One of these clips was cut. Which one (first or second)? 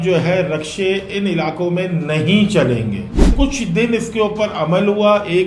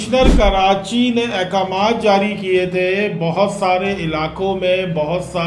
first